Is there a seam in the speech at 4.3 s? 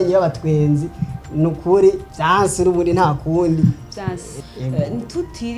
yes; 2 cuts; at 2.1 s, 4.3 s

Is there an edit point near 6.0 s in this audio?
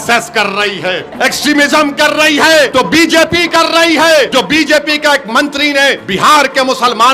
yes; 4 cuts; at 1.1 s, 2.7 s, 4.3 s, 6.0 s

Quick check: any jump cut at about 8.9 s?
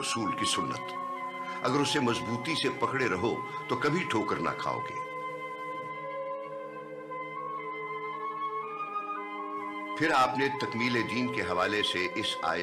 no; 0 cuts

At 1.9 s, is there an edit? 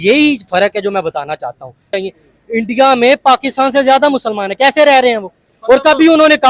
yes; 1 cut; at 1.9 s

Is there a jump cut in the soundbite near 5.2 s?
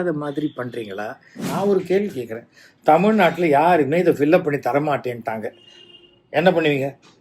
no; 1 cut; at 1.5 s

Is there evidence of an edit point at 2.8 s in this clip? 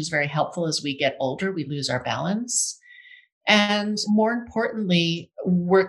no; 1 cut; at 4.0 s

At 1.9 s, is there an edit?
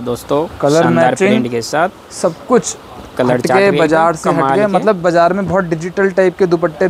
no; 0 cuts

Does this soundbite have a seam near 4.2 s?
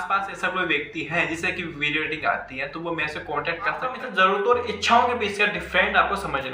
yes; 1 cut; at 4.2 s

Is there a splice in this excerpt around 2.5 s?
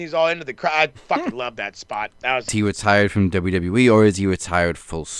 yes; 1 cut; at 2.5 s

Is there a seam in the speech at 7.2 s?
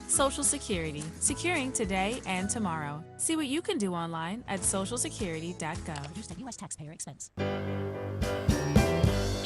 yes; 1 cut; at 7.2 s

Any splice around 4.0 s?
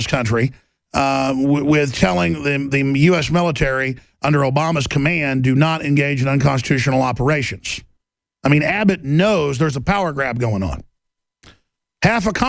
yes; 1 cut; at 4.0 s

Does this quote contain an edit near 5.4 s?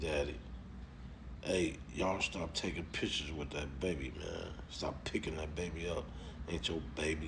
no; 0 cuts

